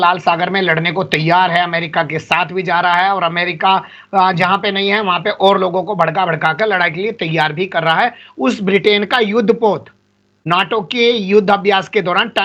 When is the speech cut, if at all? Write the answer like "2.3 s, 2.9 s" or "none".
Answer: none